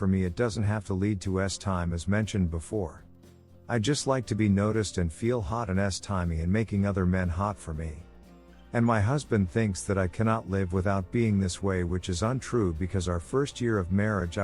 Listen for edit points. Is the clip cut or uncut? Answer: cut